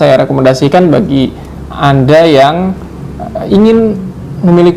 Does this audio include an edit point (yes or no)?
no